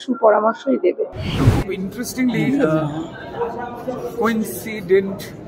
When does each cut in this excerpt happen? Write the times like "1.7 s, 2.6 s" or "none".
1.2 s